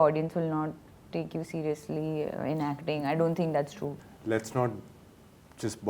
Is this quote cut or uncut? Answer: cut